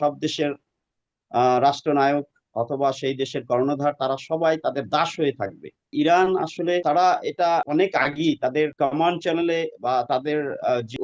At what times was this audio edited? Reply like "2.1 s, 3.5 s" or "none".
5.9 s